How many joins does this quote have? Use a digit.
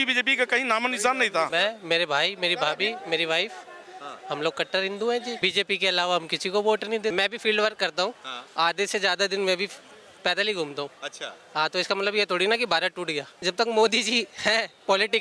4